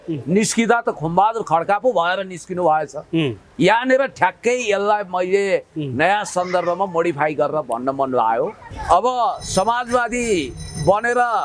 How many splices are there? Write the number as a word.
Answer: one